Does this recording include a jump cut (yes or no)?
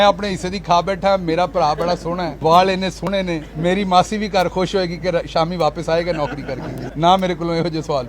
yes